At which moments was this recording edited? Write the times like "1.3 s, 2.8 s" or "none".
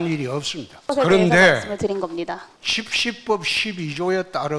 0.9 s, 2.6 s